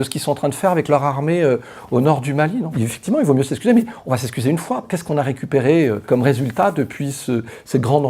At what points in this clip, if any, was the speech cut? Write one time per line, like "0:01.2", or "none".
0:02.7
0:04.8
0:06.0